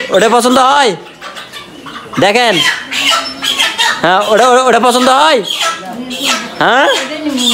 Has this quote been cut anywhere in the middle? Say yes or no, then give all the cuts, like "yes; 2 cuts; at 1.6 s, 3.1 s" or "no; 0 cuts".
no; 0 cuts